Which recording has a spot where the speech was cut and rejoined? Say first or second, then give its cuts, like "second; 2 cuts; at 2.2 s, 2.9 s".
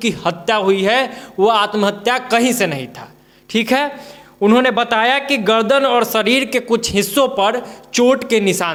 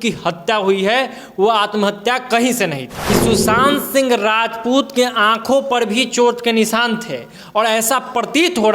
second; 1 cut; at 2.9 s